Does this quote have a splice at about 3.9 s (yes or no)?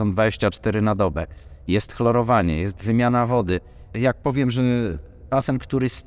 no